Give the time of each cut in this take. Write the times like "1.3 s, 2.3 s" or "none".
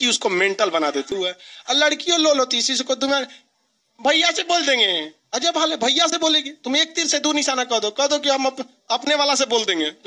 1.1 s